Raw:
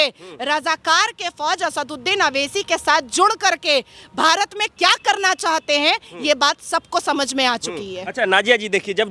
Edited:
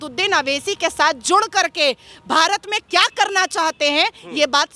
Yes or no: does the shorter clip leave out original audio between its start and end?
no